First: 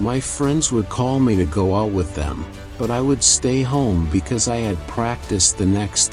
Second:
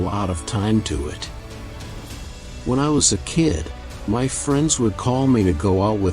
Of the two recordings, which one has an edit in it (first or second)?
second